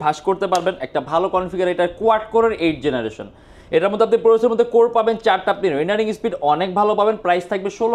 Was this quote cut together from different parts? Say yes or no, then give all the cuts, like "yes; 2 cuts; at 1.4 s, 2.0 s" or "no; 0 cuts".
no; 0 cuts